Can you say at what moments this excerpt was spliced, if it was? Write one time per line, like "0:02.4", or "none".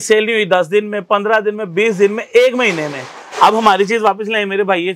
none